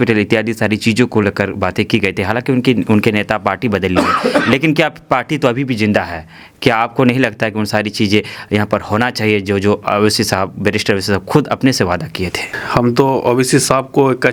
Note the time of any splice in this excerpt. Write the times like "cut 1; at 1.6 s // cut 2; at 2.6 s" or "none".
none